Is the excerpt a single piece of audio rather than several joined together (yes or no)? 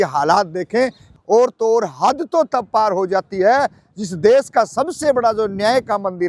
no